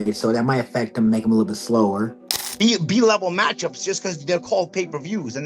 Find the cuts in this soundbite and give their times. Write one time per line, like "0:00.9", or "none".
0:02.2